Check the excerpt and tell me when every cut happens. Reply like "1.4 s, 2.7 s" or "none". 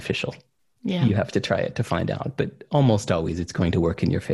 none